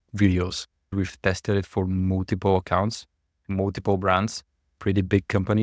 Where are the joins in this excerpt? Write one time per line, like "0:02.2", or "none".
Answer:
0:00.9